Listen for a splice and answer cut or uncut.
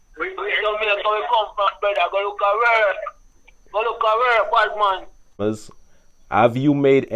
cut